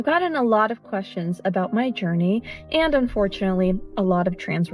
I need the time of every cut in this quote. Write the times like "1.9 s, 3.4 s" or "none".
3.5 s